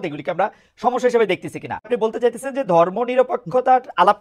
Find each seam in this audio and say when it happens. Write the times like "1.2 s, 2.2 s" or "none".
1.9 s